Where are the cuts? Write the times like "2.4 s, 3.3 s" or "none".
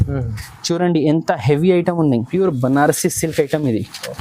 2.3 s

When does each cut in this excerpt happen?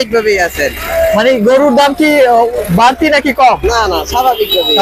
none

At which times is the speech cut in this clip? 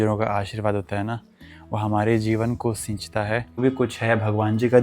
3.6 s

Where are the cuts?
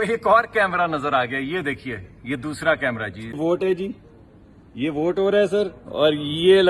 3.4 s

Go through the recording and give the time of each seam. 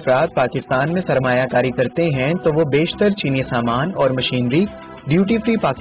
none

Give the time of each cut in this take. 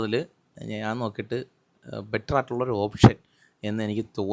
none

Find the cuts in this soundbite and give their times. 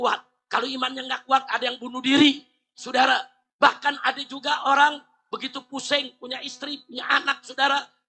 3.4 s

